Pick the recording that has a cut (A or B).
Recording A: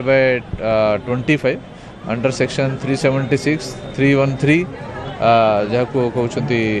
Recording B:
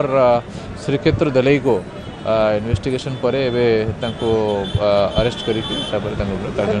B